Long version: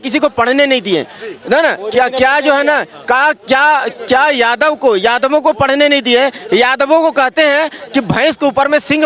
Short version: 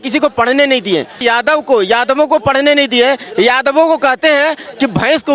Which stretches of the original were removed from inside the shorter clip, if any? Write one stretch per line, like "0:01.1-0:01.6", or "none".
0:01.2-0:04.3